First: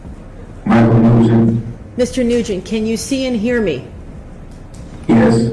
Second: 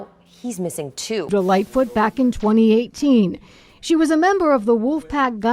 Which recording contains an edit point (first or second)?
second